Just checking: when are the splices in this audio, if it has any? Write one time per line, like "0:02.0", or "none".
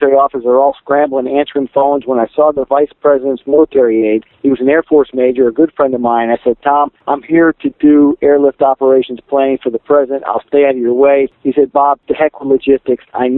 0:04.3
0:07.0
0:11.8